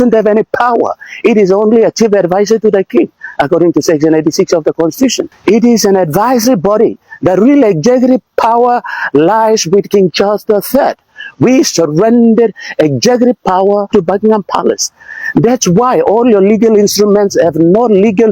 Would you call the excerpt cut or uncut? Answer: cut